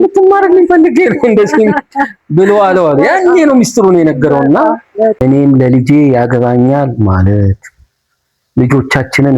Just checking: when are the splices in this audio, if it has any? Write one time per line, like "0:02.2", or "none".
0:05.2